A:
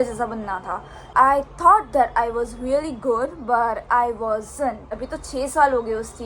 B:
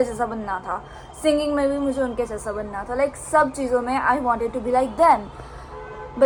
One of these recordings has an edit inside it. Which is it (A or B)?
A